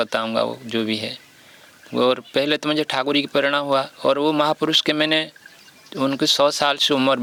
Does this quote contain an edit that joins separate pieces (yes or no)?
no